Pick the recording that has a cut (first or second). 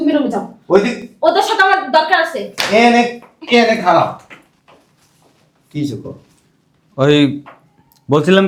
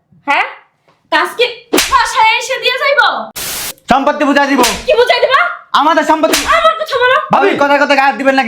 second